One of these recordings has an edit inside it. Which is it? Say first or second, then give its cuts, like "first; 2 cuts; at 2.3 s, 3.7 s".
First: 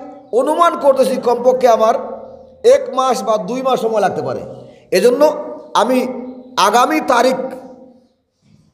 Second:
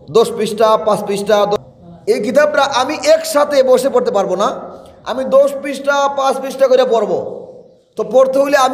second; 1 cut; at 1.6 s